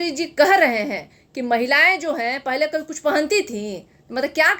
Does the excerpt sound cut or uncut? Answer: uncut